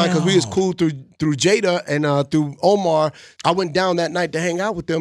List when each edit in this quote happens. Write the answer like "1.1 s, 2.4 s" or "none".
3.3 s